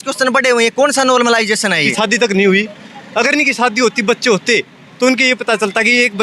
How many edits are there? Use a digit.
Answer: 1